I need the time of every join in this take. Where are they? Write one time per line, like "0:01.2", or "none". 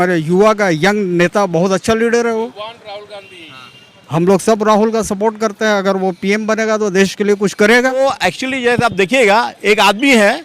0:08.0